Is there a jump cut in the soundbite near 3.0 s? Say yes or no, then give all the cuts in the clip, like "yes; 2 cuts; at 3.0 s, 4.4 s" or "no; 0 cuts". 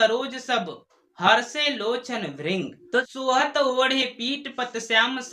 yes; 1 cut; at 3.0 s